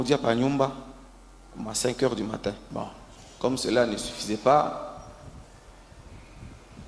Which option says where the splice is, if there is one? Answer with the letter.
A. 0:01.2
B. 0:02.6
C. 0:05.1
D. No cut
B